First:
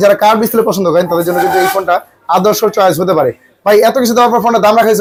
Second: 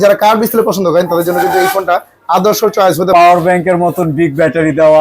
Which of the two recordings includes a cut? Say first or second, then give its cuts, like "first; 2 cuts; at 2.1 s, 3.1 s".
second; 1 cut; at 3.1 s